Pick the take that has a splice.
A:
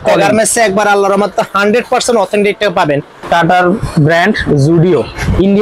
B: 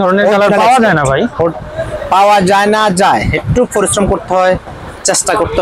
A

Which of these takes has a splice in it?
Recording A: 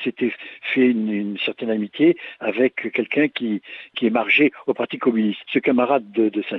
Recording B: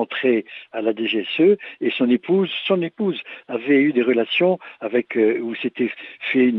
A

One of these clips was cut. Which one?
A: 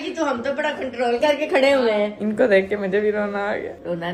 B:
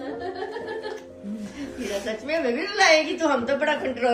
A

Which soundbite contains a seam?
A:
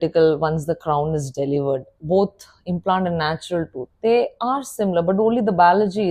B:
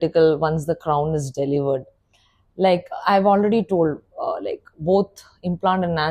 A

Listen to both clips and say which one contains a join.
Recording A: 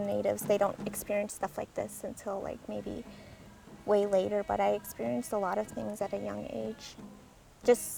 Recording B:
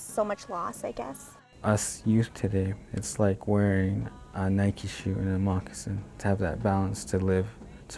B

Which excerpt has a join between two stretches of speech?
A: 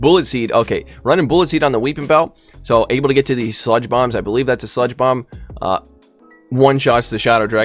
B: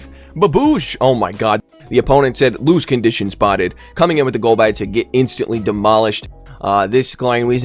B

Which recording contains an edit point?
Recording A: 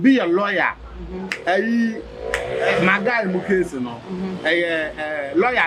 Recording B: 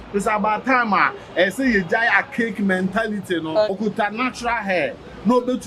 B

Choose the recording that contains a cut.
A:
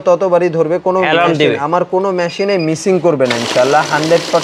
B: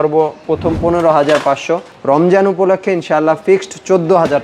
B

